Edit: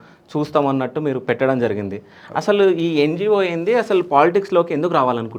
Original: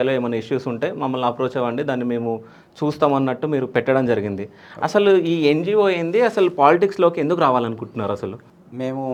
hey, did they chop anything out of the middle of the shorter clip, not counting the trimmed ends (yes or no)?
no